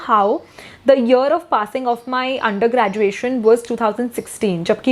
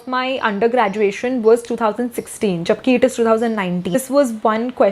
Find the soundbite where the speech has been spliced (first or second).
second